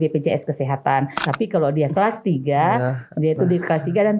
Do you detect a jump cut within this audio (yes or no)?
yes